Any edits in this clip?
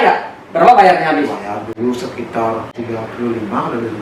yes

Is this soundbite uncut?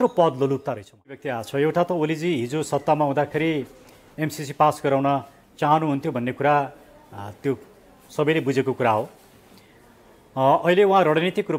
no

